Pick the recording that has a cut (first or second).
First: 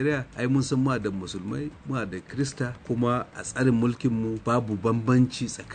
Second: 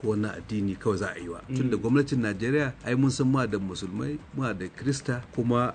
second